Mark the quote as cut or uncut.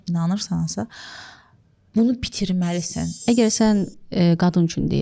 cut